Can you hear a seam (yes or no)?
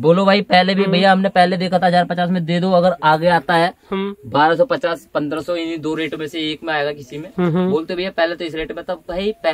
no